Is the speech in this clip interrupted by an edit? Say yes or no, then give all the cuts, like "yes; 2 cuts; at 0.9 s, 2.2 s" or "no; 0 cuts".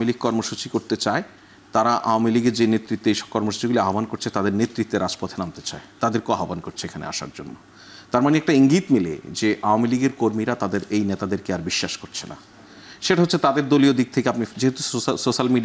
no; 0 cuts